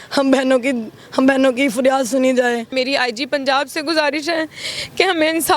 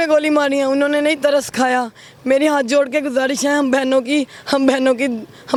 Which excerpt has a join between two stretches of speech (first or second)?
first